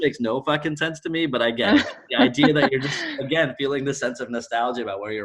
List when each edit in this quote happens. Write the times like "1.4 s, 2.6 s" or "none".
none